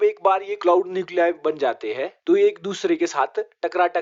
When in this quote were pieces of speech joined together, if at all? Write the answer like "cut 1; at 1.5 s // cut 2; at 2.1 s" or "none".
none